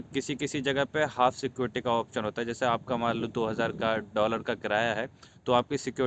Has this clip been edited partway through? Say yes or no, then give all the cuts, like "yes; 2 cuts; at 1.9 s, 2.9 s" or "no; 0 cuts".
no; 0 cuts